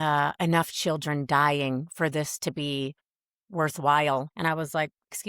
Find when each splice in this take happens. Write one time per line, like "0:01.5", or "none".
0:04.3